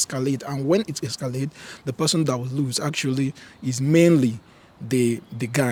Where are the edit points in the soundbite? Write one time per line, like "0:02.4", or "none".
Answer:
none

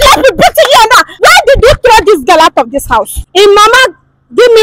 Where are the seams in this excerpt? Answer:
0:01.1
0:03.2

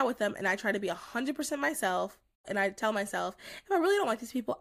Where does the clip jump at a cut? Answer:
0:02.4

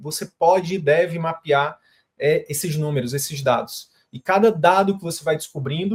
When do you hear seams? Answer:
none

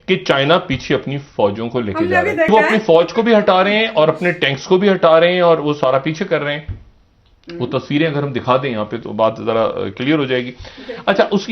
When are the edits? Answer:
0:02.5

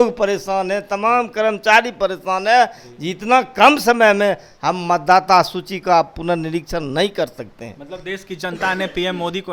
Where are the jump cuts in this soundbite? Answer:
none

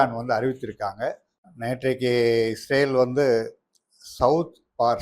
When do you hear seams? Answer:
0:01.3

